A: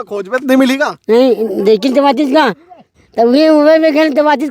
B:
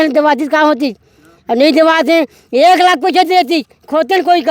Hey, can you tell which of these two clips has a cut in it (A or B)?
A